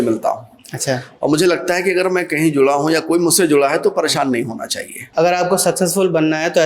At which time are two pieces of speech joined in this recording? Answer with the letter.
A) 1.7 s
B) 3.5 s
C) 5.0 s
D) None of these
C